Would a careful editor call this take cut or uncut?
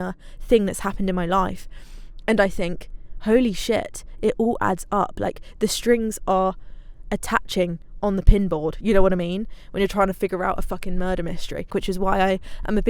cut